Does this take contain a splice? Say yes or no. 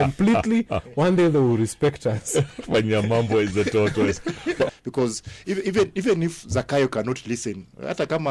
yes